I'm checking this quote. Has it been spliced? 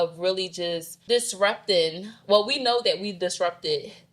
yes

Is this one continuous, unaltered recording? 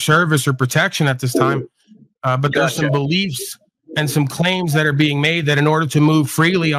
yes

